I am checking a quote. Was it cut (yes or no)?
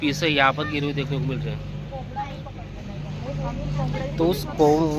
no